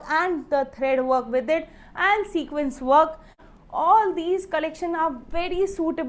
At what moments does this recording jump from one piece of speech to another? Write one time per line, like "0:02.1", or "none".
0:03.4